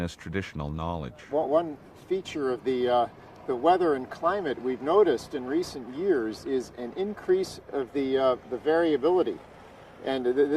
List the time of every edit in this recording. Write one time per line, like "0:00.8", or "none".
0:01.2

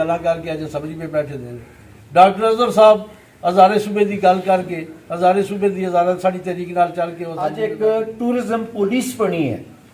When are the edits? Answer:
0:07.4

